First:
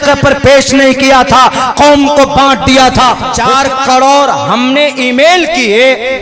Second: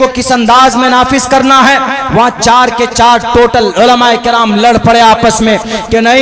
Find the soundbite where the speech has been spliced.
first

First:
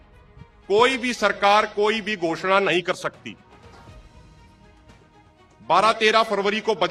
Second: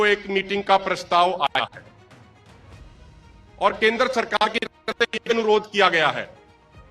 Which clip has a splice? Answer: second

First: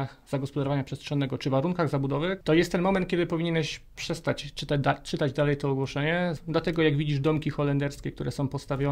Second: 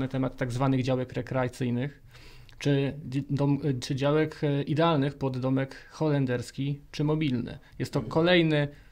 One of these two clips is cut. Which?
first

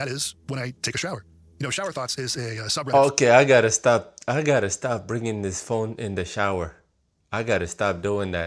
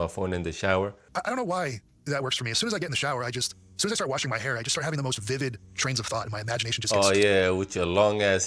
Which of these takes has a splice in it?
second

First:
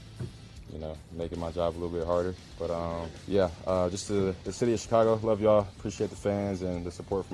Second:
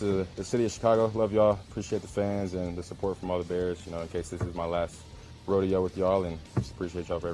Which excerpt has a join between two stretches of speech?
first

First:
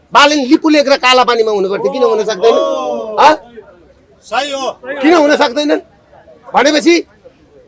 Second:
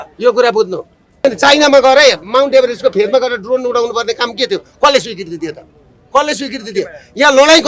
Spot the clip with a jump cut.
second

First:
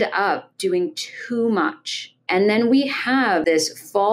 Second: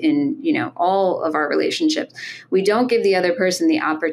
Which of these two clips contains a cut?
first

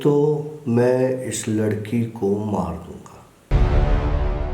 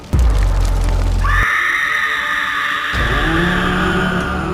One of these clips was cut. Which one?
first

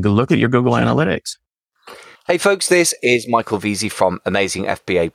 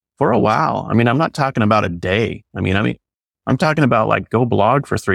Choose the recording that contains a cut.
first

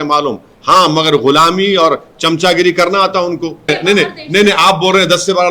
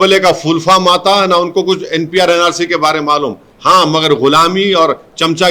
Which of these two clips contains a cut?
first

